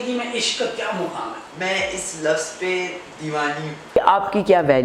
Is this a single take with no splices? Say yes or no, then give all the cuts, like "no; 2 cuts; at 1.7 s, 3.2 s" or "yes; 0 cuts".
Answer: no; 2 cuts; at 1.4 s, 4.0 s